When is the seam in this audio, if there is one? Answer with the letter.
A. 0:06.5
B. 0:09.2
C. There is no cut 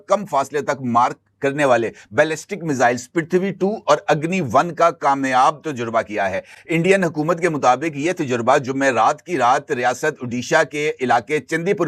C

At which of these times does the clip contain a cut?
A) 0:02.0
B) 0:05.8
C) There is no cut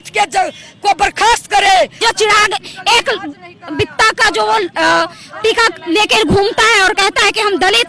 A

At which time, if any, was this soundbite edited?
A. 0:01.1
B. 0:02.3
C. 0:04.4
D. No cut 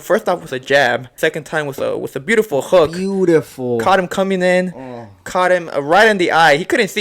A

